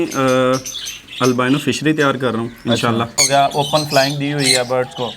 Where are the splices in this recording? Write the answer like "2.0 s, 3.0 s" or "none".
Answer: 3.2 s